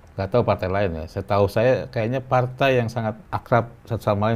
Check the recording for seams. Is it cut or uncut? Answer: cut